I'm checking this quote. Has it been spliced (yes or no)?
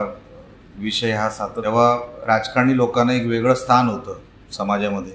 yes